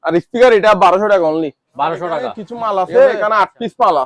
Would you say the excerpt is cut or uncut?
cut